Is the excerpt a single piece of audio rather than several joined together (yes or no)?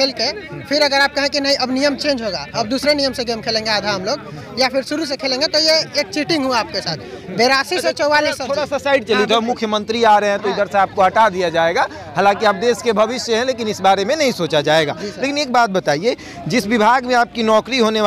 yes